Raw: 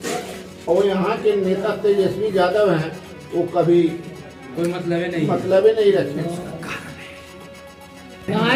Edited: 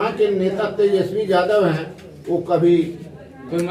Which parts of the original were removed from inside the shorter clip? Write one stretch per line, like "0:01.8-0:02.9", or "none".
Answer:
none